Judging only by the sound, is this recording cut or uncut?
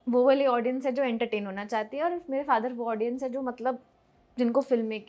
uncut